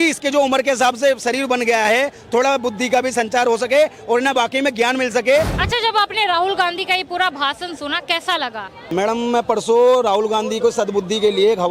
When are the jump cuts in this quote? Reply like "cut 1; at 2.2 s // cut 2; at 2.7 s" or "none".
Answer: cut 1; at 5.6 s // cut 2; at 8.8 s